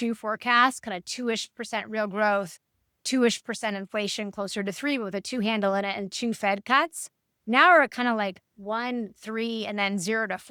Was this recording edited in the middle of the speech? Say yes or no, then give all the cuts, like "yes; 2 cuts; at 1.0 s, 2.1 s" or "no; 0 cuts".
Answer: no; 0 cuts